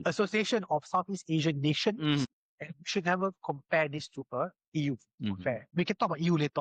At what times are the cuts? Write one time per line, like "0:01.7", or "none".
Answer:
0:02.3
0:05.7